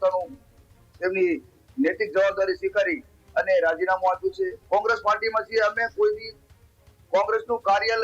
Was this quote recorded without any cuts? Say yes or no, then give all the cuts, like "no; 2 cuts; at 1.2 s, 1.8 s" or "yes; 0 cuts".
no; 1 cut; at 4.6 s